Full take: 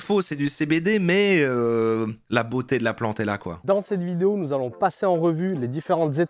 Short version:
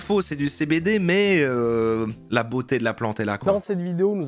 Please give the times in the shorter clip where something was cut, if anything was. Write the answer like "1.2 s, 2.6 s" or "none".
3.4 s